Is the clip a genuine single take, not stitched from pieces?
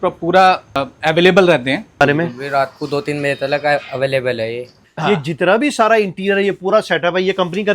no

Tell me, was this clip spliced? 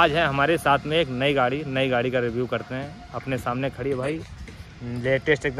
no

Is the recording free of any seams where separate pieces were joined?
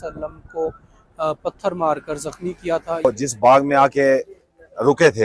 no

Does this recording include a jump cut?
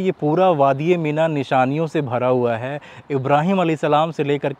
no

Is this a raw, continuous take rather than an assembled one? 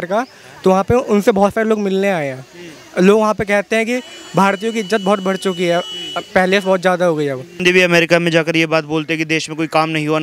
no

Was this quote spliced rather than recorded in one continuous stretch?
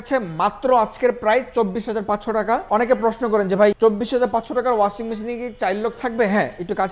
yes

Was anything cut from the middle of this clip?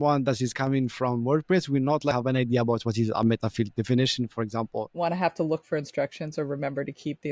yes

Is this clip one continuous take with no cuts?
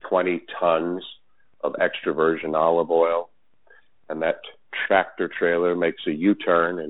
yes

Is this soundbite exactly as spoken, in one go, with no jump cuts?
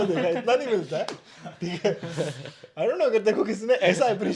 yes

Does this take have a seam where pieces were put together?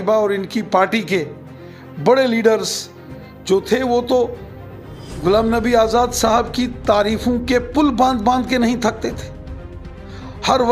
no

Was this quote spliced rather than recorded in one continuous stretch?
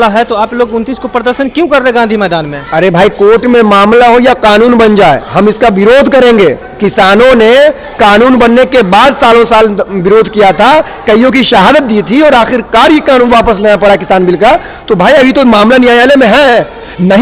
no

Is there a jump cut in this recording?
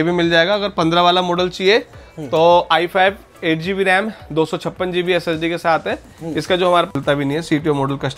yes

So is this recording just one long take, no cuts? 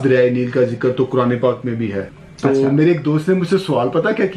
no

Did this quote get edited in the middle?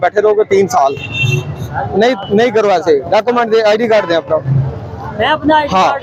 no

